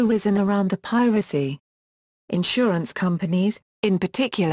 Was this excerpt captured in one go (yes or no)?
yes